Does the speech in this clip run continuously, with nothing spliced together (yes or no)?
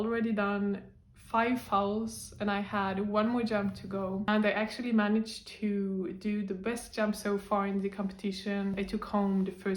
no